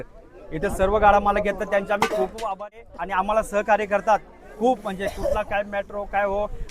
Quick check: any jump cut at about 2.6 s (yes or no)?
yes